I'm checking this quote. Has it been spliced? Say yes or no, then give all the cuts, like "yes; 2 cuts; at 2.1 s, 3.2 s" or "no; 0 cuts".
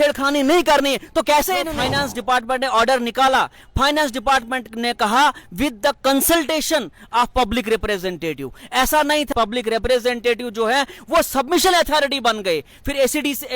yes; 2 cuts; at 1.8 s, 9.3 s